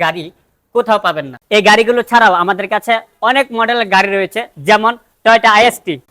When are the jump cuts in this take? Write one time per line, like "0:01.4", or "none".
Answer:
0:01.3